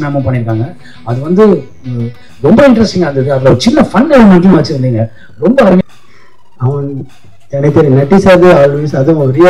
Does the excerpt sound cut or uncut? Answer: cut